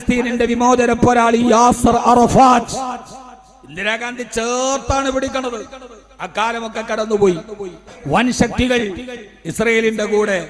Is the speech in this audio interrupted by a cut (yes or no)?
yes